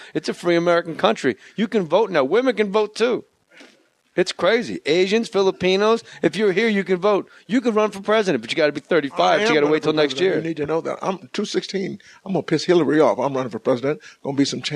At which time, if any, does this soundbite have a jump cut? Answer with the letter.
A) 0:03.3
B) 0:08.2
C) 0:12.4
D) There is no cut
B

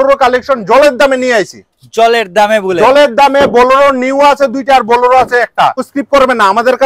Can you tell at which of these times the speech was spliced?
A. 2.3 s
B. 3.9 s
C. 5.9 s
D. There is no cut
C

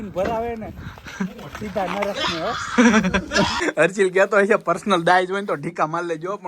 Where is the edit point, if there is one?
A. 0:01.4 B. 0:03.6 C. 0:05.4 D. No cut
B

